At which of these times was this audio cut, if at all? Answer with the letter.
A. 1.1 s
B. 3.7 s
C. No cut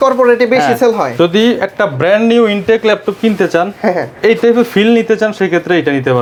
C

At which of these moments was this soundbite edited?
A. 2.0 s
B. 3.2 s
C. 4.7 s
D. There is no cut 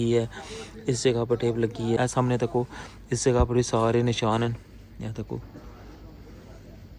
A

